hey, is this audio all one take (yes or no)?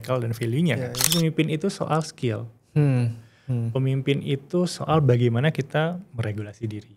no